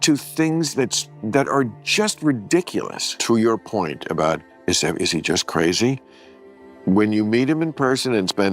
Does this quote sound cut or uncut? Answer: cut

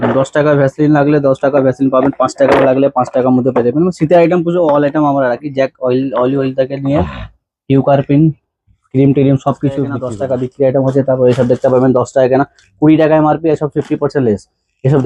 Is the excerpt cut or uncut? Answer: cut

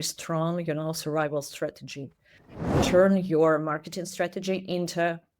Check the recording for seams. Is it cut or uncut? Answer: cut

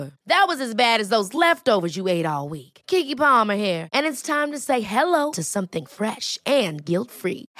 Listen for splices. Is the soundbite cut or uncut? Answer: uncut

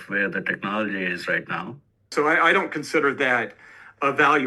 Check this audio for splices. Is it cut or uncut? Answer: cut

